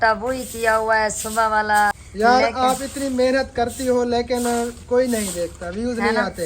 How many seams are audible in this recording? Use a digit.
1